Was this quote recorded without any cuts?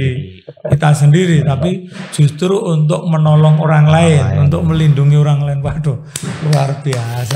yes; 0 cuts

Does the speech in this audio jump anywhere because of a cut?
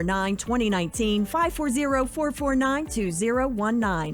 no; 0 cuts

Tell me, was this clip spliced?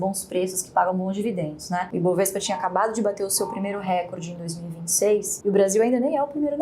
yes; 2 cuts; at 1.9 s, 5.3 s

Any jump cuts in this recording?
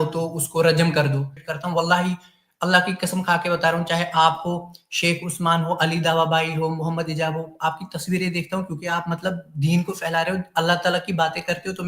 yes; 1 cut; at 1.4 s

